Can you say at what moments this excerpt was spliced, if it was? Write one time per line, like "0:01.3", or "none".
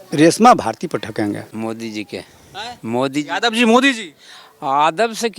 0:01.5